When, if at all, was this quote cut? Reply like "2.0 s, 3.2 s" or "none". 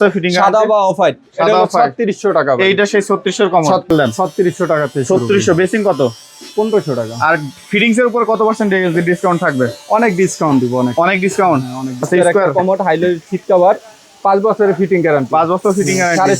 3.9 s, 12.0 s